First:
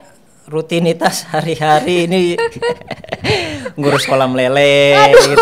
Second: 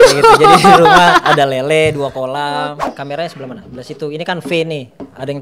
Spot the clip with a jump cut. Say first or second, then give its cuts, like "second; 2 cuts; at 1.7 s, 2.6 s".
second; 1 cut; at 2.9 s